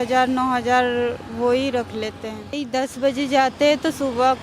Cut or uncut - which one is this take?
cut